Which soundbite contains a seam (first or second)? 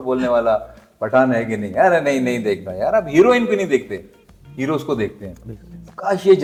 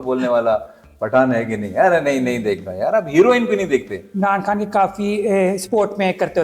second